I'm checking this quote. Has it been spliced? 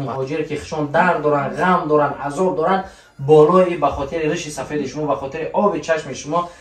no; 0 cuts

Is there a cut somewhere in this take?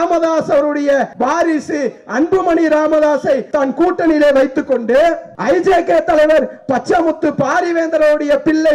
yes; 3 cuts; at 1.1 s, 3.5 s, 5.3 s

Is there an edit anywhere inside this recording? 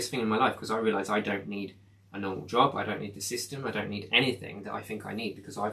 no; 0 cuts

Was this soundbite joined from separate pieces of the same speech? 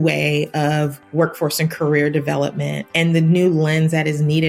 yes; 2 cuts; at 1.0 s, 2.8 s

